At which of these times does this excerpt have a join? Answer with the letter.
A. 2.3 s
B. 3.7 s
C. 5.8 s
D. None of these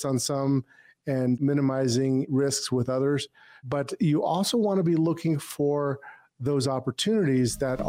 A